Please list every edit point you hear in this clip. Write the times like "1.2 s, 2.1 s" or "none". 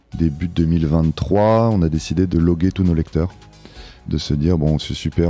2.3 s